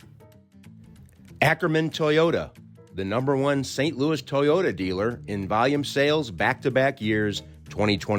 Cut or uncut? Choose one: cut